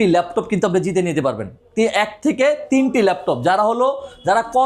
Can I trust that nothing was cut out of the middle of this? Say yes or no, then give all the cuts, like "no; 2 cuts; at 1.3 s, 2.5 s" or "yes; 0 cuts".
yes; 0 cuts